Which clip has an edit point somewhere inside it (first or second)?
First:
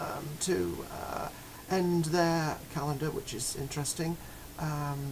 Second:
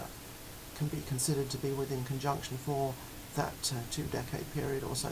second